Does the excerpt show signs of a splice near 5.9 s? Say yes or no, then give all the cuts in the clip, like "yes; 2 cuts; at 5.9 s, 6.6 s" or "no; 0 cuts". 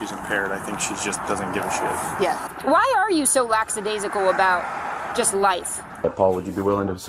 yes; 2 cuts; at 2.4 s, 5.9 s